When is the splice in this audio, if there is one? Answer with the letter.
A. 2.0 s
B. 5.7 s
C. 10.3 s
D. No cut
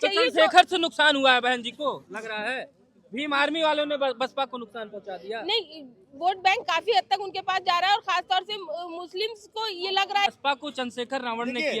C